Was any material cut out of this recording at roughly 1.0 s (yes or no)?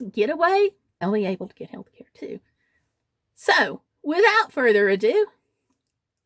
yes